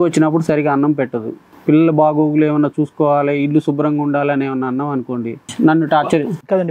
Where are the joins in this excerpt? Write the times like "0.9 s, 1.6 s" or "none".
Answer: 5.5 s